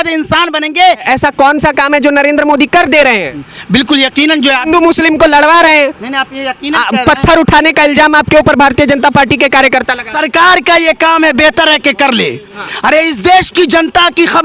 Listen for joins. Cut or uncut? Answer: cut